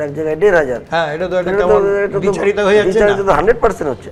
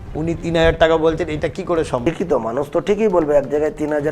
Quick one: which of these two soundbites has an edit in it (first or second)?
second